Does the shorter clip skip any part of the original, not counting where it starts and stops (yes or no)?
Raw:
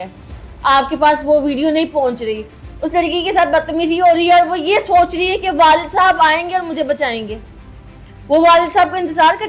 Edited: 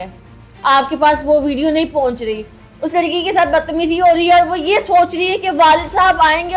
no